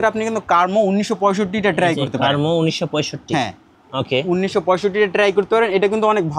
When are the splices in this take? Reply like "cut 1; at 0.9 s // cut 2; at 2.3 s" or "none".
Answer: none